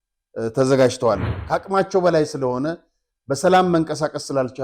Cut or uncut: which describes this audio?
cut